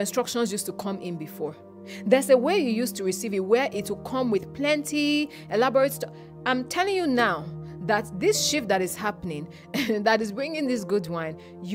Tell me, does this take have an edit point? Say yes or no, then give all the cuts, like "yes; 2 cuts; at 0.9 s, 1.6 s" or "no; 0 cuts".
no; 0 cuts